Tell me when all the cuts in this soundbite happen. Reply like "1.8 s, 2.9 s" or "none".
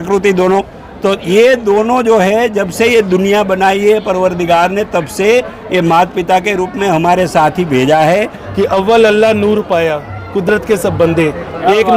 8.4 s